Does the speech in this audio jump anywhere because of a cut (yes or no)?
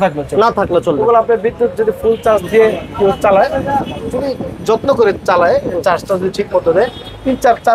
no